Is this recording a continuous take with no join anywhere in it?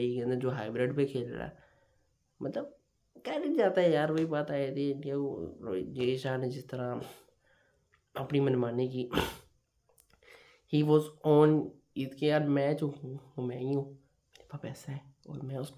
yes; 0 cuts

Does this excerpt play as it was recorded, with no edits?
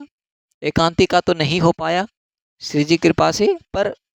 yes; 0 cuts

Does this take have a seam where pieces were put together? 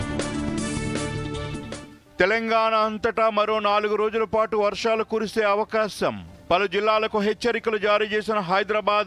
yes; 1 cut; at 1.0 s

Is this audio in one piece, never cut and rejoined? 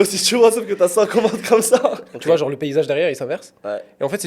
no; 1 cut; at 2.1 s

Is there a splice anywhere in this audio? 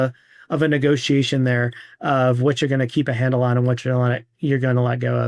no; 0 cuts

